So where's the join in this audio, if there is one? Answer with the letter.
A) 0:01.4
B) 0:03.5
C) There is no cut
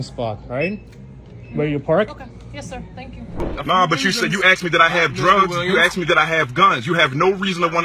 B